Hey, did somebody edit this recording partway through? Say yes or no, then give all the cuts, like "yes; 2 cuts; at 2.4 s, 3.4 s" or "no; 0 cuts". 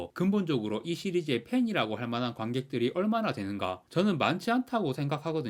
no; 0 cuts